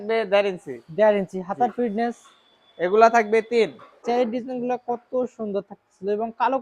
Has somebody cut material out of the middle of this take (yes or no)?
yes